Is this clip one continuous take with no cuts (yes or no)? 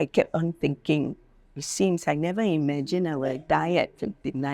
yes